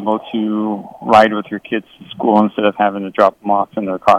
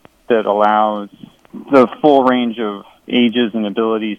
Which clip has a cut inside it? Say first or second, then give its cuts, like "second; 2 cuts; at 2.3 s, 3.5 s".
second; 2 cuts; at 1.6 s, 3.0 s